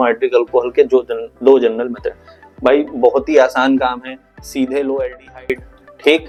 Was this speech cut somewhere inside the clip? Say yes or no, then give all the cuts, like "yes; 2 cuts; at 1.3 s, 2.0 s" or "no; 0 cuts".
no; 0 cuts